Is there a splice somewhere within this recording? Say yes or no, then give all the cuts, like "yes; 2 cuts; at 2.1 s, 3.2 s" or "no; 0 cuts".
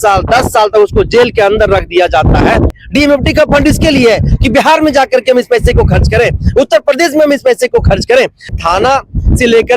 yes; 2 cuts; at 2.8 s, 8.5 s